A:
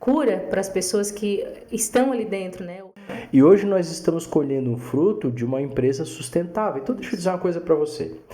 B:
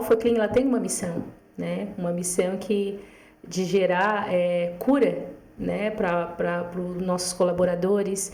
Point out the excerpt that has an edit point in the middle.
A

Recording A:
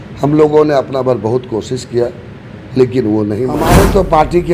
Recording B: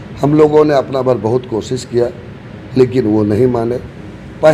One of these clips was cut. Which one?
A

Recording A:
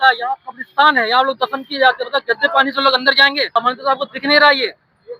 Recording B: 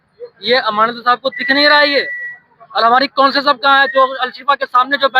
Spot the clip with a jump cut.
A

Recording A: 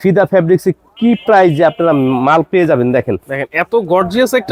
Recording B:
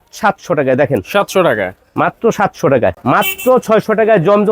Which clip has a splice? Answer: B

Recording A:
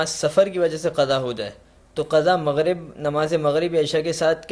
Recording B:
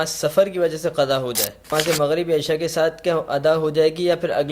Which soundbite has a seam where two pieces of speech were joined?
B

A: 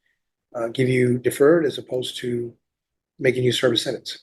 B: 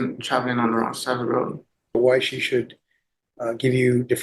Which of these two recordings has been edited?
B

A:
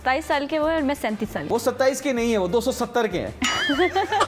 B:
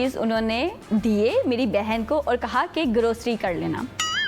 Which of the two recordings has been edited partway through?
A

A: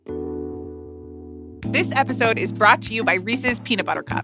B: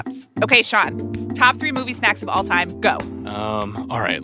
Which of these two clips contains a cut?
A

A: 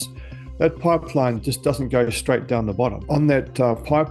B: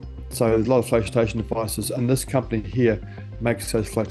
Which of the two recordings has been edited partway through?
A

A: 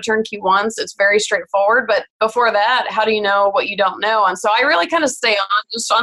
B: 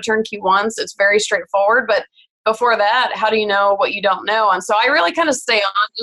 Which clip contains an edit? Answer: A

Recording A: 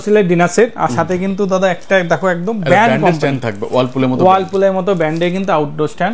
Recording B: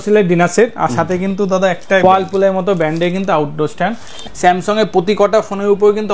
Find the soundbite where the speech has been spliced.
B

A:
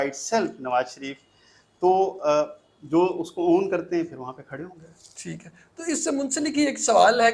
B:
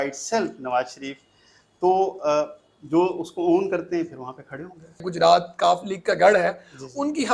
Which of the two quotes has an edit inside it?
B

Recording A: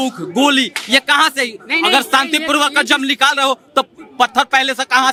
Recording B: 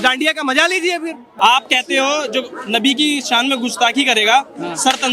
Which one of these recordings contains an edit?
B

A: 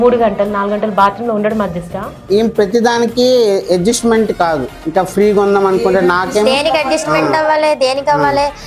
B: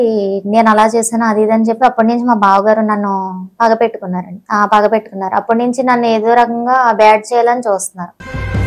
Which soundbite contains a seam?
A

